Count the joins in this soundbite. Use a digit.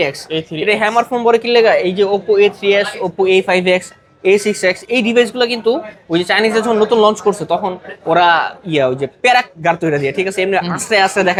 0